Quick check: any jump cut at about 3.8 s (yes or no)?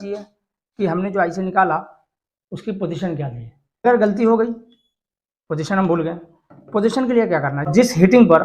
yes